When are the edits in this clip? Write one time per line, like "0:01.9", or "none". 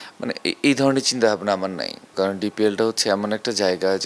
0:02.0